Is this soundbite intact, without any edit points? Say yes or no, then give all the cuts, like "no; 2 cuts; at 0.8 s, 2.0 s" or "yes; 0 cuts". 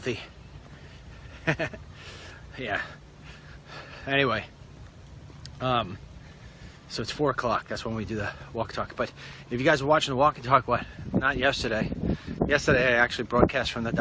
no; 1 cut; at 12.6 s